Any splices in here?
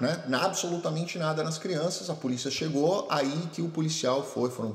no; 0 cuts

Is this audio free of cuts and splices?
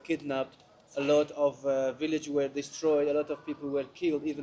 yes; 0 cuts

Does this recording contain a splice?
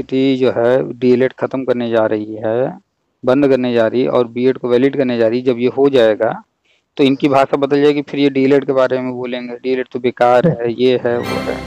no; 0 cuts

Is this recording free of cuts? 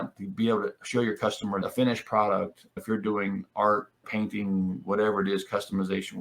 no; 1 cut; at 1.6 s

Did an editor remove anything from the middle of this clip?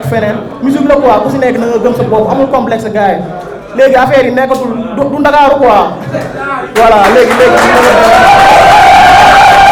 no; 0 cuts

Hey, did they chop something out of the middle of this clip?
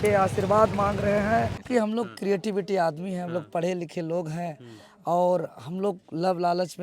yes; 1 cut; at 1.6 s

